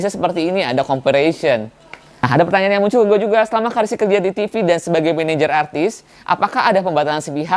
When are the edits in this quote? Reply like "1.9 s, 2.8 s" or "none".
2.3 s